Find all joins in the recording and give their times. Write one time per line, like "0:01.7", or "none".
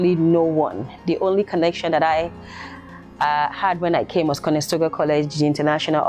none